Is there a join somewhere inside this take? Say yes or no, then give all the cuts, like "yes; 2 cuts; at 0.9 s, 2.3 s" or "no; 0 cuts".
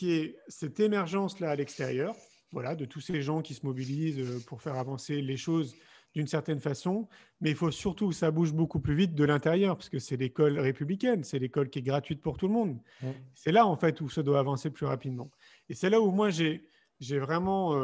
no; 0 cuts